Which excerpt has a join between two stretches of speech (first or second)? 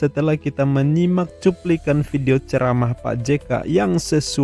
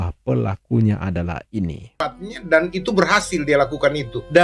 second